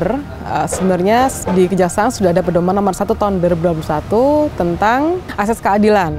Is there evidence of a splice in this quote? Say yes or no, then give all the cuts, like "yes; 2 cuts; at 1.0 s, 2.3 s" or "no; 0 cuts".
yes; 1 cut; at 5.3 s